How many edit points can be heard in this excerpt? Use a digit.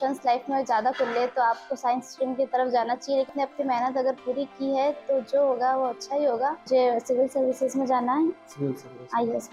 2